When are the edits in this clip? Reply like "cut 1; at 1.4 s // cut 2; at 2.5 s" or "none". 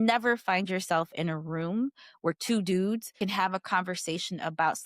cut 1; at 3.1 s